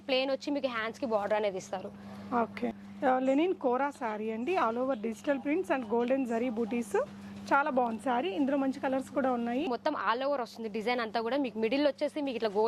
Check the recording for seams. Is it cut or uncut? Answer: cut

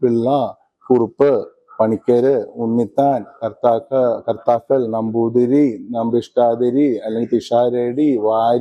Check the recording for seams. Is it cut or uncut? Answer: uncut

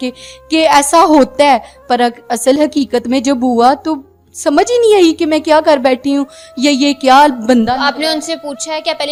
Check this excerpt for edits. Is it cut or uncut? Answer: uncut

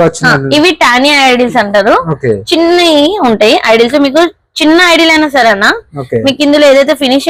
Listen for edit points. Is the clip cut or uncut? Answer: uncut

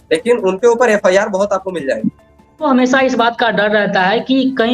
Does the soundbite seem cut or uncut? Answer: cut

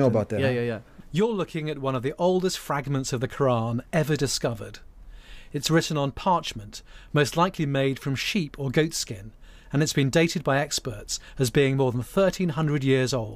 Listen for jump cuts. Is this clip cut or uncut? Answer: uncut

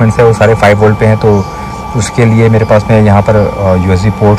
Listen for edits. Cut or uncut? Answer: uncut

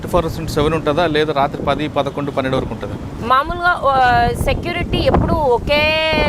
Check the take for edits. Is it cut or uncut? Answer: uncut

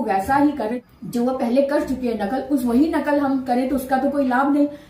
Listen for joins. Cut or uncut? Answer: uncut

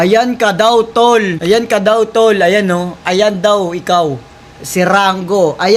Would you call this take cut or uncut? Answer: uncut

